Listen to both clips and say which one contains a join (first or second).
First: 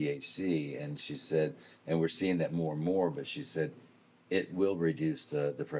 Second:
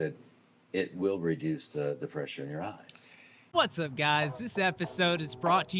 second